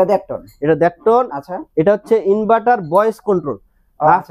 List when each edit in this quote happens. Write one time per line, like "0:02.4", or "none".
none